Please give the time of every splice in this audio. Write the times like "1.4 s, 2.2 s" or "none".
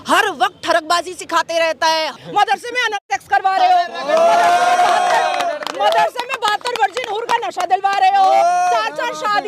2.2 s